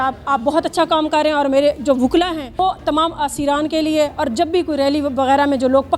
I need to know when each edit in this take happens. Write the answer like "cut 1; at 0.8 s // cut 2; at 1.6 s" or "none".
cut 1; at 2.6 s